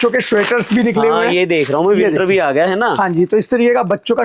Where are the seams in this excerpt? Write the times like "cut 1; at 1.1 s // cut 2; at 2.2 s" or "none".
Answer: none